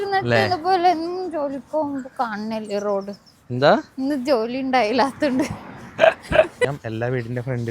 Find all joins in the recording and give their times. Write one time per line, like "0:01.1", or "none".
0:06.6